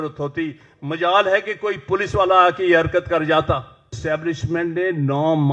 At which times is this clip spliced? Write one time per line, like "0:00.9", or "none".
0:04.0